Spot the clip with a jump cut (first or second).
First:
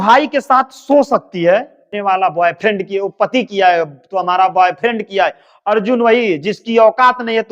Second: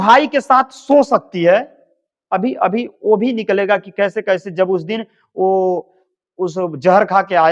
first